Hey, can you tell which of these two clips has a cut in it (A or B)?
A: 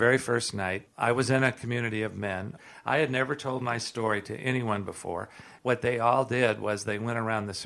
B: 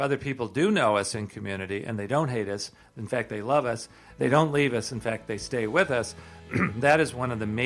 A